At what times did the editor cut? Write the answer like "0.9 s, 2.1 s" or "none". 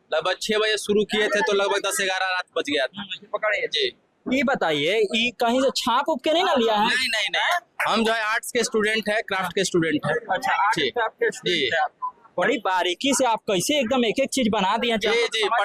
none